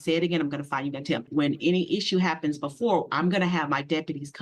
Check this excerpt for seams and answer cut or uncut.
cut